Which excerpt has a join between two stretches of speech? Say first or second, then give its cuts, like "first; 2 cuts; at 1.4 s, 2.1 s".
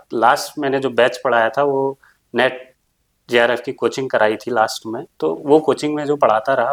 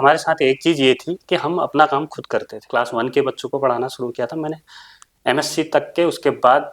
second; 1 cut; at 2.6 s